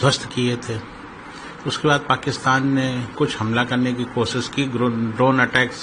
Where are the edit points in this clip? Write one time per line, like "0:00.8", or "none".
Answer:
none